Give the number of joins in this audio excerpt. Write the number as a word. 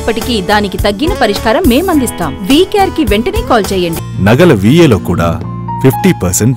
one